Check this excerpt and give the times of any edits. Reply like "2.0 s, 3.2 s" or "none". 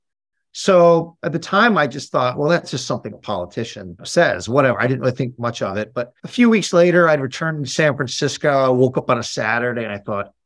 2.8 s, 4.1 s, 6.2 s